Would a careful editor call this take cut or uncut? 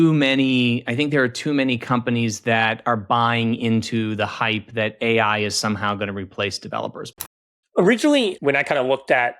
cut